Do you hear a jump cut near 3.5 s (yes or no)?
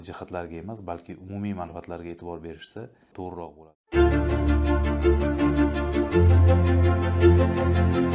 yes